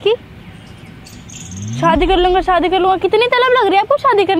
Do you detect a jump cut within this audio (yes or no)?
no